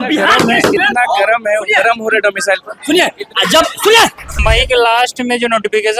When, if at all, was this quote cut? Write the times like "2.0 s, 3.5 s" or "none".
4.4 s